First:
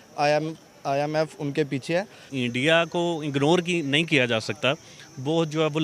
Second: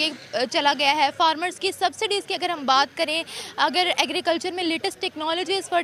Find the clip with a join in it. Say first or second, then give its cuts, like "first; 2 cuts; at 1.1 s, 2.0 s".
first; 1 cut; at 2.3 s